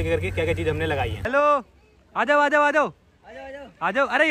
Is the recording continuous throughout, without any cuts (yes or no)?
no